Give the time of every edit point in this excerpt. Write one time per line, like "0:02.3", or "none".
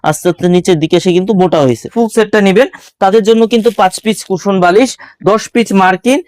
0:01.9